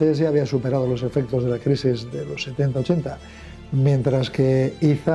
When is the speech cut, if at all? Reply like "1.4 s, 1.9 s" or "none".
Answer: none